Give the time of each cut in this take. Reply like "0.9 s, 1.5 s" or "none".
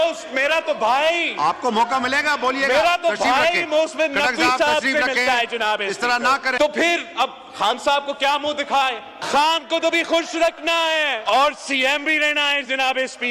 6.6 s, 9.2 s, 11.2 s